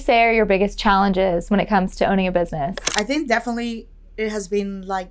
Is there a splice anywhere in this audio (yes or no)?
yes